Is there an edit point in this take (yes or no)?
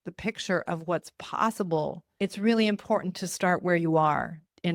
yes